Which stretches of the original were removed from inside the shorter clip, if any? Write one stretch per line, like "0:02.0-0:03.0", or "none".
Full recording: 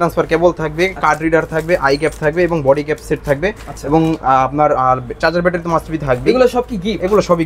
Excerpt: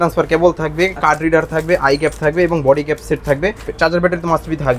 0:03.7-0:05.1